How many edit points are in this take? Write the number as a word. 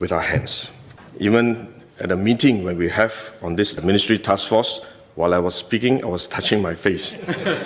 one